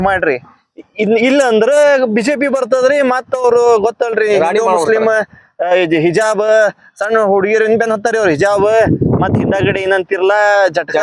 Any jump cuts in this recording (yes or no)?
no